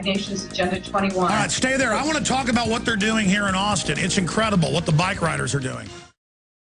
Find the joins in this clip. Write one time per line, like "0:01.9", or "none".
0:05.7